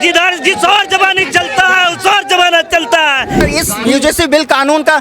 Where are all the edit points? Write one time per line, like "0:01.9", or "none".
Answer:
0:03.4